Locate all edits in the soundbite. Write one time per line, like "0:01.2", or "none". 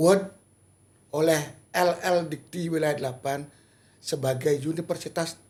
none